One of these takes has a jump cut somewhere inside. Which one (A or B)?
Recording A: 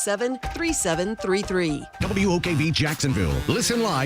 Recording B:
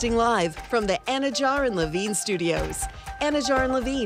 A